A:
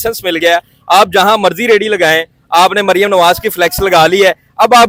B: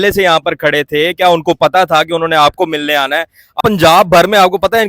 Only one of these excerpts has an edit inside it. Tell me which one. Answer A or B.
B